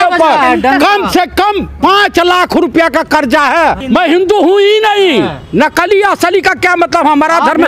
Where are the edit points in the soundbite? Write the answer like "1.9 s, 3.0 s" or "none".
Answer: 3.8 s